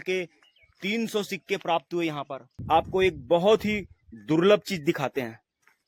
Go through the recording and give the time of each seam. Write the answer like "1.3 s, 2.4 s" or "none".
2.5 s

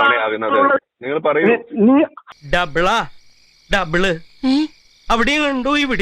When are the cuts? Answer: 2.3 s

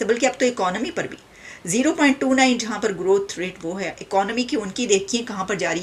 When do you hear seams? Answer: none

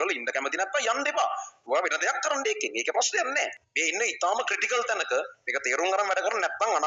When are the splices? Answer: 3.6 s

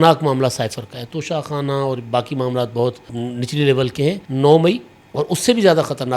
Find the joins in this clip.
3.1 s, 4.2 s

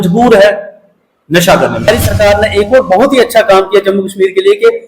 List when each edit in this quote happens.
1.9 s

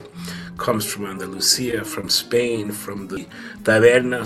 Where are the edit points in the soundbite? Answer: 3.2 s

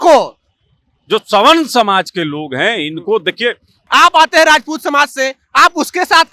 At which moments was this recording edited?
3.8 s

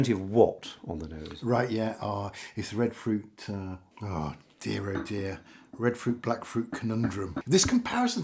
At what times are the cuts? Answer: 3.9 s, 7.4 s

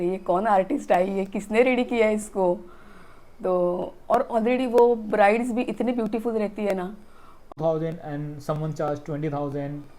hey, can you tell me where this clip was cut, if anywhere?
7.5 s

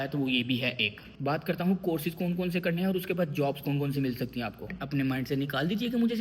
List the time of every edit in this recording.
1.0 s, 4.7 s

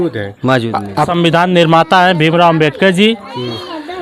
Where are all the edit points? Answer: 1.0 s

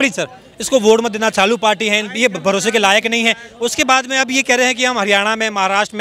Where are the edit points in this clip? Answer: none

